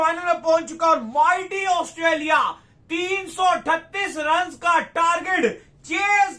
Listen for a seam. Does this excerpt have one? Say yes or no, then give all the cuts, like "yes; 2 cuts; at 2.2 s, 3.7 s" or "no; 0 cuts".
no; 0 cuts